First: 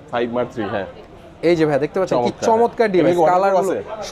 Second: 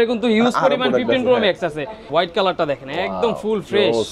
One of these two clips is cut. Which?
second; 1 cut; at 2.1 s

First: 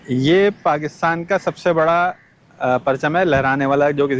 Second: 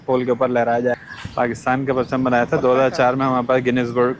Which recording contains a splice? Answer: second; 1 cut; at 0.9 s

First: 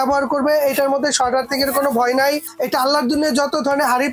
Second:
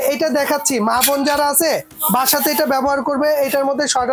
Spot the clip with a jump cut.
first; 1 cut; at 2.5 s

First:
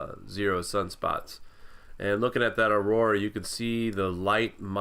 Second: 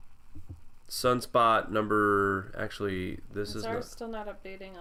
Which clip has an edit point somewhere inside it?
first; 1 cut; at 2.8 s

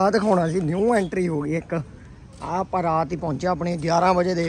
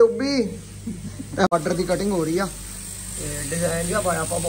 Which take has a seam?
second; 1 cut; at 1.5 s

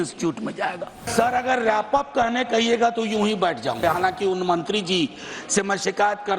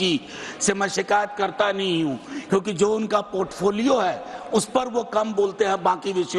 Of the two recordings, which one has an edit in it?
first; 2 cuts; at 1.1 s, 3.8 s

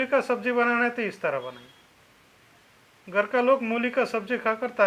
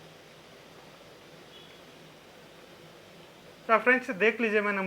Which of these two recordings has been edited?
second; 1 cut; at 3.6 s

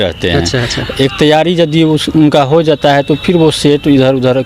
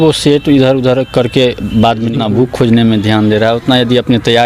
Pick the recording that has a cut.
second; 1 cut; at 2.1 s

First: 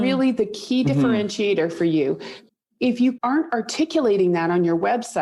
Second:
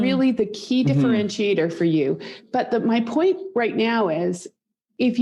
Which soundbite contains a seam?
first; 2 cuts; at 2.3 s, 3.2 s

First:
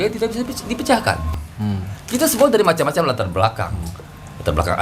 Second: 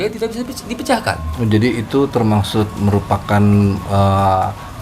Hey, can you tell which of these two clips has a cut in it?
first; 1 cut; at 1.3 s

